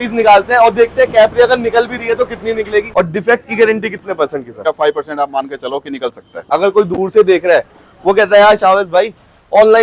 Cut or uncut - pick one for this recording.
cut